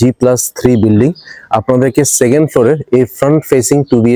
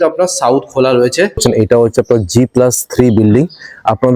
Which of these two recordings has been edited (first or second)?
second